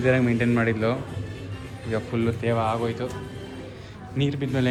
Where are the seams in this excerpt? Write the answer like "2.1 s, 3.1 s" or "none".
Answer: none